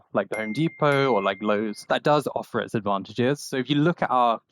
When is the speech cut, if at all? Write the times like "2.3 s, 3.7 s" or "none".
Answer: 1.8 s, 3.5 s